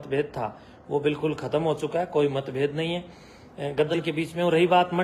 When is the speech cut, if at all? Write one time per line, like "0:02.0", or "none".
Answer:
0:03.9